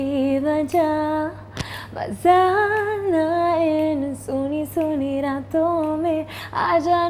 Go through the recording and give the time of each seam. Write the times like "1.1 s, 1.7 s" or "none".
none